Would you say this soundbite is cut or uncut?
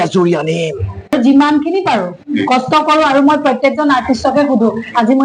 cut